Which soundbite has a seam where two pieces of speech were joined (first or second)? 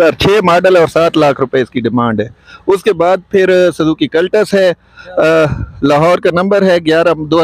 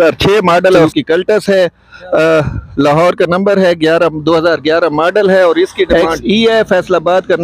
second